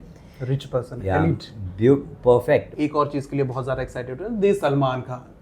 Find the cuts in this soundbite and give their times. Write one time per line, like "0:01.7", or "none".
0:02.7

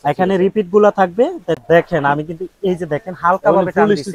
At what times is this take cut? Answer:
0:01.6

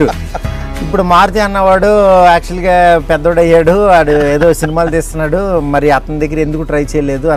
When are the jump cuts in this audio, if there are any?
none

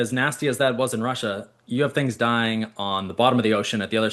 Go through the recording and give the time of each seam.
none

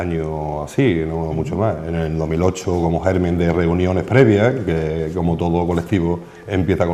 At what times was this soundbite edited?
0:04.2

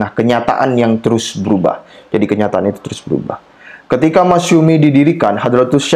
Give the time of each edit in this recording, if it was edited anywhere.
none

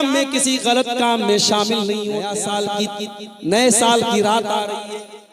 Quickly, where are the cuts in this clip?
0:02.6

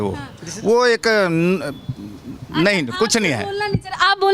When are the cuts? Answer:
none

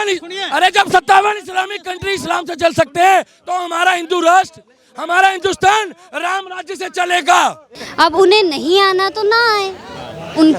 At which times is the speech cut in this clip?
0:07.7

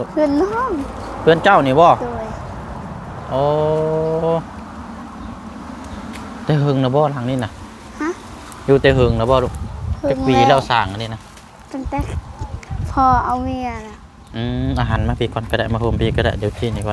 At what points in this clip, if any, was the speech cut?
none

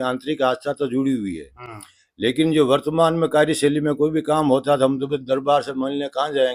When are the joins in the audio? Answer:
none

